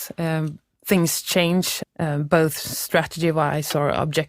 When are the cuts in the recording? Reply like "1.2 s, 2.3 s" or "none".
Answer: 1.8 s